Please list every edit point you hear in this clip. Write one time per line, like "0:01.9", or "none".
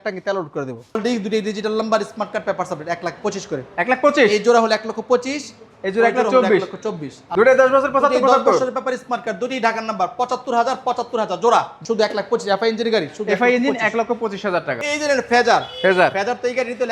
0:01.0
0:07.2
0:11.7
0:14.8